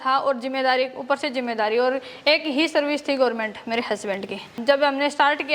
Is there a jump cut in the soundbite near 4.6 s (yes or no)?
yes